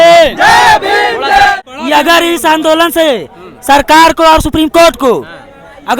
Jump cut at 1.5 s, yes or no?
yes